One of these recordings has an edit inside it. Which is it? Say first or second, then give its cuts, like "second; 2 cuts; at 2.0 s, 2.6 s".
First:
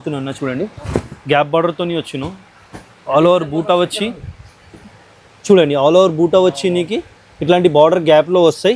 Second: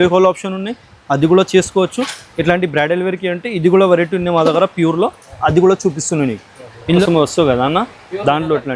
second; 1 cut; at 7.0 s